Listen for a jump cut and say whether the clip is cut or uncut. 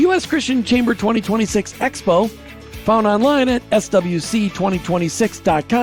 uncut